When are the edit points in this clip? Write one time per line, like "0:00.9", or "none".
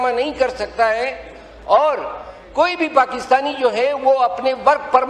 none